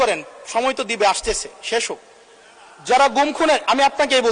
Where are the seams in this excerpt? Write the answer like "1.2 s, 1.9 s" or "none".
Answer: none